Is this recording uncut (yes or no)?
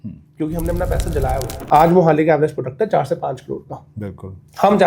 no